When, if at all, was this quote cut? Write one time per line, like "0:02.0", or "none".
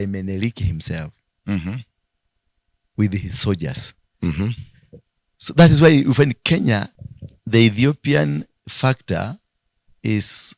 0:07.0